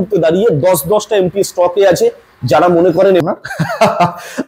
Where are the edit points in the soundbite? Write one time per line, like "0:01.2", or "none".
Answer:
0:03.2